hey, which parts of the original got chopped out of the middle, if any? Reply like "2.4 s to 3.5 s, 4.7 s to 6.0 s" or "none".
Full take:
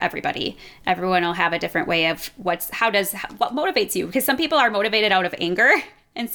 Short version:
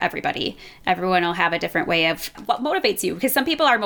2.3 s to 3.2 s